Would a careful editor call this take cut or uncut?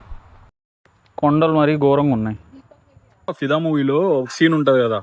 cut